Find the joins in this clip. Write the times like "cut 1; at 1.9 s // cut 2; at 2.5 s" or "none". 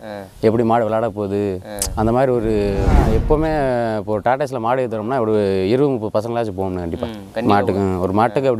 cut 1; at 3.0 s